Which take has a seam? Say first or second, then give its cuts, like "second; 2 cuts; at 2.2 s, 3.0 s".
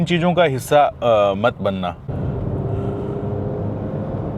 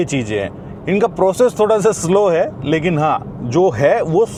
first; 1 cut; at 2.0 s